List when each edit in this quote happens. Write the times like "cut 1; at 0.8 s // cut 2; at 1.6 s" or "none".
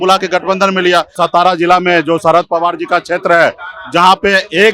cut 1; at 1.1 s